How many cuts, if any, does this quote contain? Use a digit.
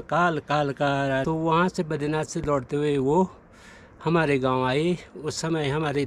1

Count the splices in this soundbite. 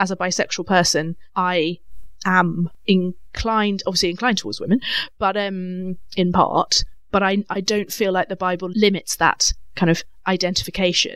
1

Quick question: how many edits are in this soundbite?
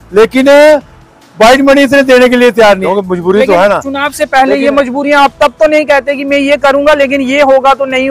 1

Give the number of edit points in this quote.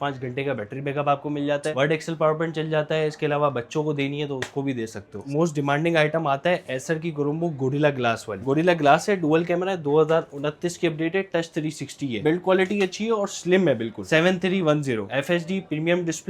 6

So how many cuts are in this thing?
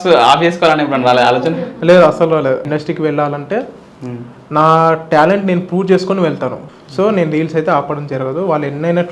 2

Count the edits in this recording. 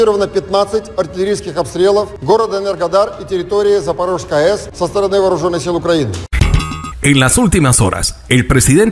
3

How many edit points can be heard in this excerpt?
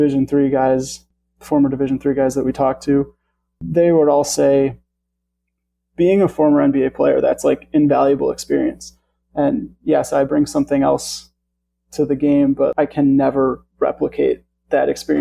3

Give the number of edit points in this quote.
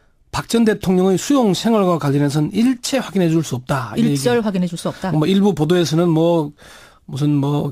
1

